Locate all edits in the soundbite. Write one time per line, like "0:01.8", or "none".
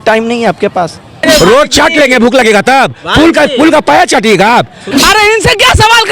0:01.2
0:04.9